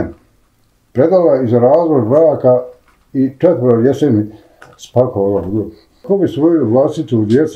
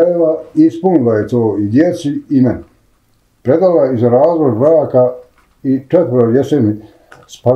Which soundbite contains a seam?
first; 1 cut; at 6.0 s

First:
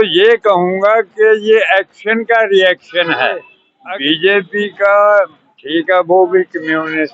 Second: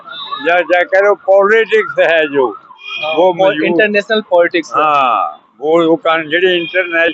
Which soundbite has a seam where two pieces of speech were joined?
first; 1 cut; at 3.6 s

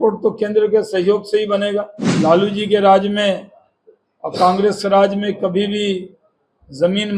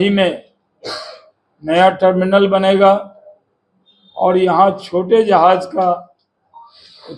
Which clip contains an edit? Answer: first; 1 cut; at 2.0 s

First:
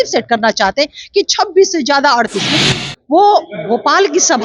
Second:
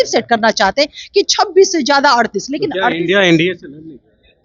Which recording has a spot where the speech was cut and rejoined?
first; 1 cut; at 2.6 s

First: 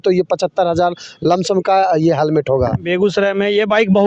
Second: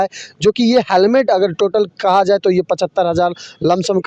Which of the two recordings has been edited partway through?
first; 1 cut; at 2.9 s

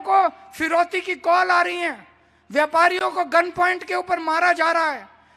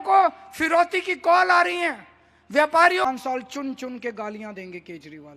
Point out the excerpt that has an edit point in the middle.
second; 1 cut; at 3.0 s

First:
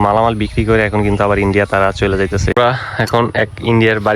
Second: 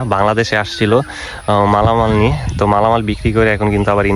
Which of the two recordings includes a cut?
first; 1 cut; at 2.6 s

